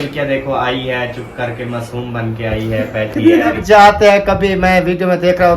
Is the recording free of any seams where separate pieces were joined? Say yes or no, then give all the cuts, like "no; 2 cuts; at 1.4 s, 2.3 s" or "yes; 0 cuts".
no; 1 cut; at 3.6 s